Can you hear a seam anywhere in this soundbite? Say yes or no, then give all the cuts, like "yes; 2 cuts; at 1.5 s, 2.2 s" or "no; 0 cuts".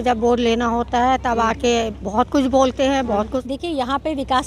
yes; 1 cut; at 3.4 s